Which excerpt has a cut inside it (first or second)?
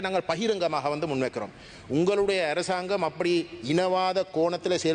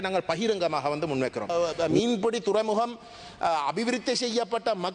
second